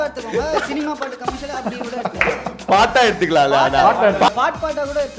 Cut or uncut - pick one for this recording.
cut